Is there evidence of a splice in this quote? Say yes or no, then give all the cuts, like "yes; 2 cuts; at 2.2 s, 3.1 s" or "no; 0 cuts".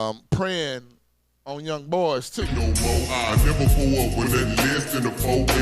yes; 1 cut; at 2.5 s